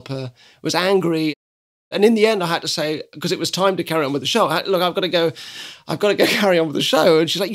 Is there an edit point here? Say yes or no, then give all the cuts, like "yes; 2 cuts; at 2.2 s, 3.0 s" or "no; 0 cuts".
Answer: no; 0 cuts